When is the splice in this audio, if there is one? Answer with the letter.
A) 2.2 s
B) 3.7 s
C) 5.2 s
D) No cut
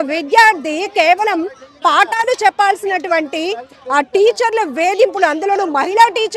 D